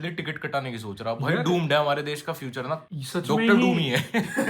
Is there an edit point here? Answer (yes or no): yes